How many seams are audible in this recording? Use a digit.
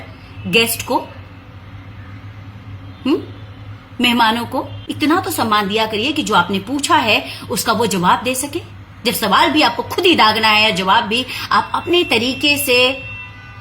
1